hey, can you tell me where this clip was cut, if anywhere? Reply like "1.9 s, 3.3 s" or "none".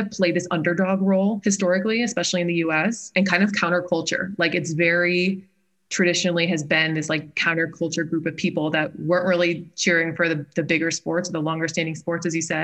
3.1 s